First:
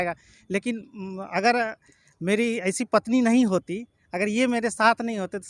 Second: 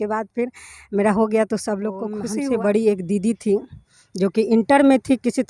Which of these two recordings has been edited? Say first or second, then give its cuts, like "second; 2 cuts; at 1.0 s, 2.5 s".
second; 1 cut; at 2.2 s